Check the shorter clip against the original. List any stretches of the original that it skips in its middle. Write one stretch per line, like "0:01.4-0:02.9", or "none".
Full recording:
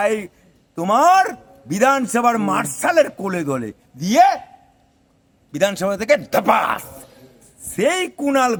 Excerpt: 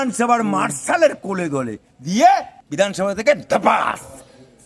0:04.5-0:05.4